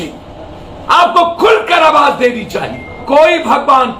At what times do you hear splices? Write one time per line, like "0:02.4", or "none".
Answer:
0:03.0